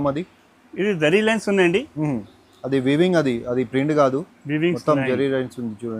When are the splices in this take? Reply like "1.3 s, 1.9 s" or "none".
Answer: none